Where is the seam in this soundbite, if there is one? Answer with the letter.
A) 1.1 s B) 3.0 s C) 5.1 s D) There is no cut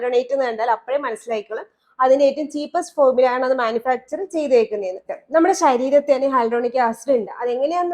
C